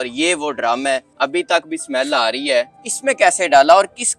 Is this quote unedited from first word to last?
no; 2 cuts; at 1.1 s, 2.8 s

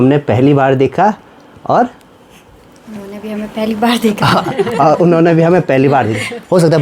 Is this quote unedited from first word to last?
yes; 0 cuts

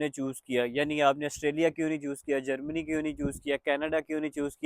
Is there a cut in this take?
no; 0 cuts

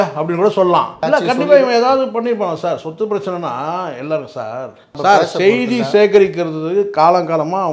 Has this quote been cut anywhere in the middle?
yes; 2 cuts; at 1.0 s, 4.9 s

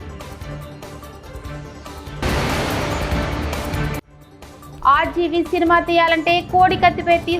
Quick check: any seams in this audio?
yes; 2 cuts; at 2.2 s, 4.1 s

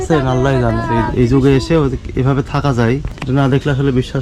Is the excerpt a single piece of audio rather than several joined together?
no; 2 cuts; at 0.9 s, 3.1 s

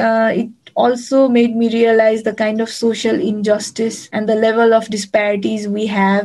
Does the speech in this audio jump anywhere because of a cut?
yes; 1 cut; at 4.0 s

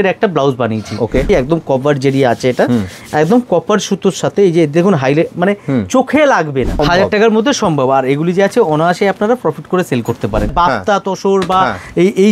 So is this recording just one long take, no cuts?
no; 3 cuts; at 1.2 s, 6.8 s, 10.5 s

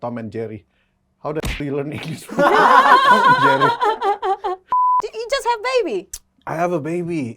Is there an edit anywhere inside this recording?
yes; 1 cut; at 4.7 s

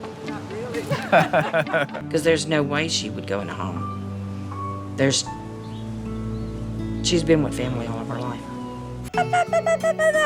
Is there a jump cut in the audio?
yes; 2 cuts; at 2.0 s, 9.1 s

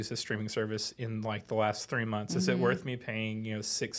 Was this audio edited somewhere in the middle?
no; 0 cuts

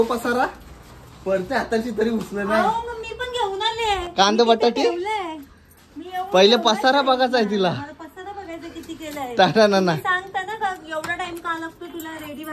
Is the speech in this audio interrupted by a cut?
no; 0 cuts

